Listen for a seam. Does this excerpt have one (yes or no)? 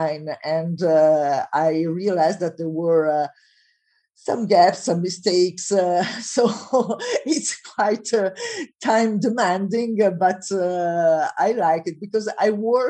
no